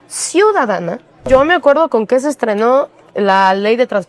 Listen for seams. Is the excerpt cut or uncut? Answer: cut